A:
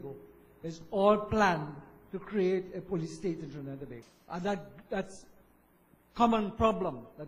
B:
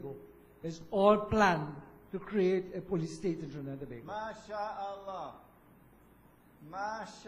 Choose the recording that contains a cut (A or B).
B